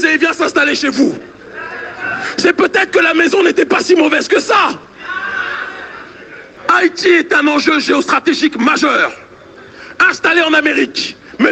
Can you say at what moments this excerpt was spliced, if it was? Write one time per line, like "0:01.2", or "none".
0:06.5